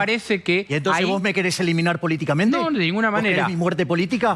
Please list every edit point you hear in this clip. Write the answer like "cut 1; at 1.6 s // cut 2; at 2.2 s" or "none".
none